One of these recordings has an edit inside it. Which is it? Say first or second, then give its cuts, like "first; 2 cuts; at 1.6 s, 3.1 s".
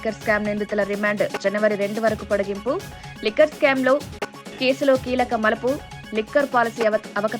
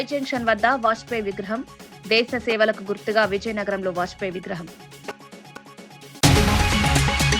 second; 1 cut; at 5.6 s